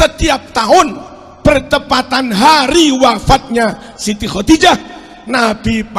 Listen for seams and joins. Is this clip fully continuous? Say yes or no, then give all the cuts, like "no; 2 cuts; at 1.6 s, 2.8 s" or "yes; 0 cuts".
yes; 0 cuts